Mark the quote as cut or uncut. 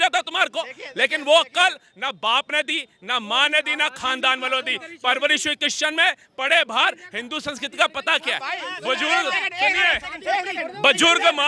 uncut